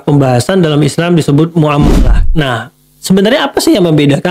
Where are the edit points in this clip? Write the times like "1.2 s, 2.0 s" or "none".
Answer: 1.9 s